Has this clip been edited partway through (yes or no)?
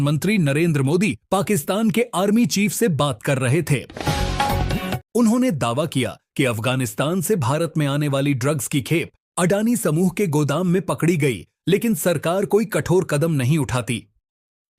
no